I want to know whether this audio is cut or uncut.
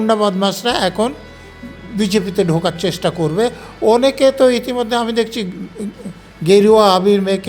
uncut